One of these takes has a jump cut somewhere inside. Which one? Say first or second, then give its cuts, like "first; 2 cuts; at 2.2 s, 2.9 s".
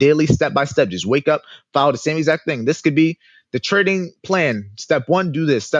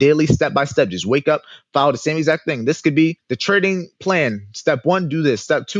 second; 1 cut; at 3.3 s